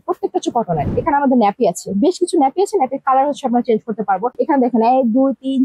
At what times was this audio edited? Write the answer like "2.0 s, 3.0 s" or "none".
0.9 s